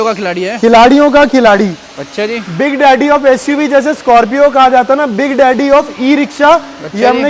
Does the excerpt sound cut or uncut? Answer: uncut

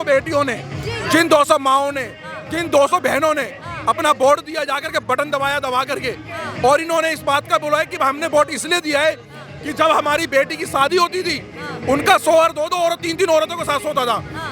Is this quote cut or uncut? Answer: uncut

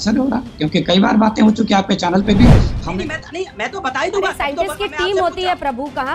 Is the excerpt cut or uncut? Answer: cut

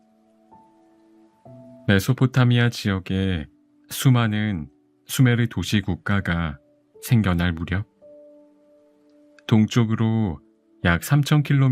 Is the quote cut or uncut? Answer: cut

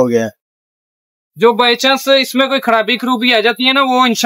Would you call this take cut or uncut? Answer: uncut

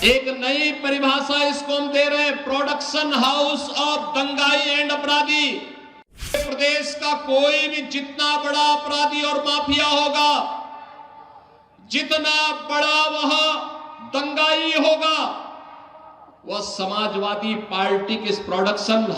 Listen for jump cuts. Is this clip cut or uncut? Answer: cut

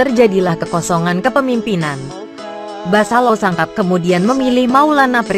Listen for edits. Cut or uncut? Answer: cut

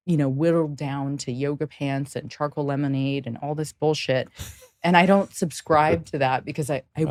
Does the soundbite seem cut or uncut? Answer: uncut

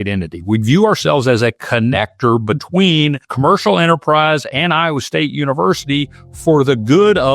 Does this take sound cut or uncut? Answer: cut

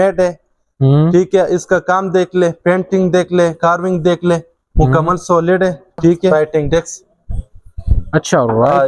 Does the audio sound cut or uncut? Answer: cut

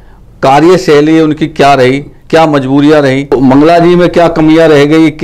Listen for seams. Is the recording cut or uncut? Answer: cut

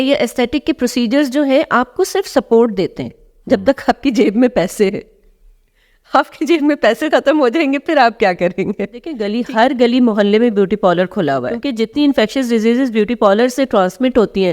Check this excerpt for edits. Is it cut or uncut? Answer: cut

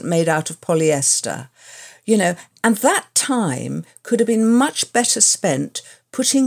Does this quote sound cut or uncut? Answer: uncut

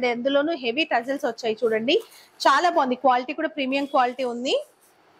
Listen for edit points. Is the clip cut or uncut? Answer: uncut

